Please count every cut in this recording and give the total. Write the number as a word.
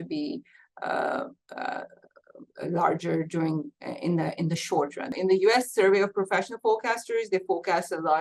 one